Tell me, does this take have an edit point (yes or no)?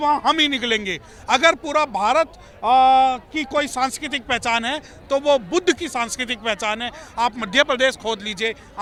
no